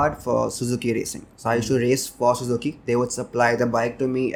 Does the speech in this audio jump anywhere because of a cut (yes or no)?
no